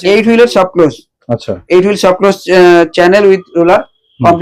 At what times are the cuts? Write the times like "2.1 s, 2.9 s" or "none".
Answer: none